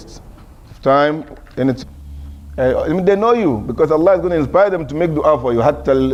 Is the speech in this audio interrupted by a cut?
no; 0 cuts

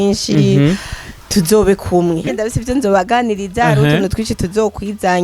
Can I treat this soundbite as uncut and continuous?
no; 1 cut; at 2.2 s

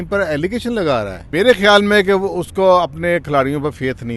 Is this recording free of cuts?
no; 1 cut; at 1.2 s

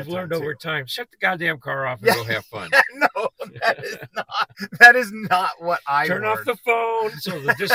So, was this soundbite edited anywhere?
yes; 1 cut; at 4.5 s

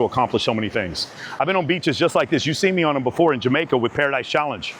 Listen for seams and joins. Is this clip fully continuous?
yes; 0 cuts

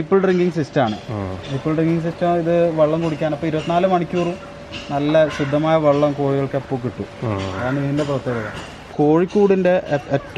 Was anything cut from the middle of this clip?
yes; 1 cut; at 8.9 s

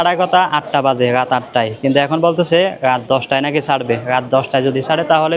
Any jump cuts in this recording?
no; 0 cuts

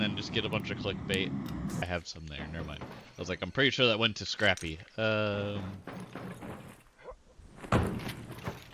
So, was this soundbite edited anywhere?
yes; 1 cut; at 1.8 s

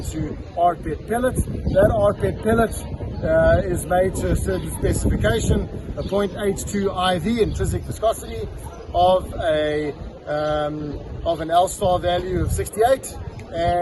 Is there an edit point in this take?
no; 0 cuts

